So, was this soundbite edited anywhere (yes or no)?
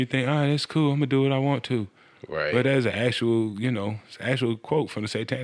no